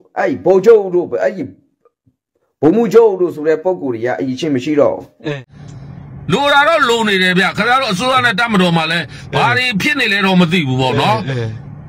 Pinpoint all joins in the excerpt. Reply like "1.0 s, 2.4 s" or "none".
5.4 s